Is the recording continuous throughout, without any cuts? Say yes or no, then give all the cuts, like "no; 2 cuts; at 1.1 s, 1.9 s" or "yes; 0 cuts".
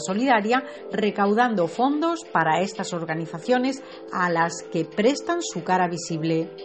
no; 1 cut; at 2.3 s